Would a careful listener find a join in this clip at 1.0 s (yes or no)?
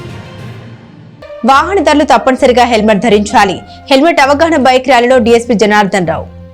yes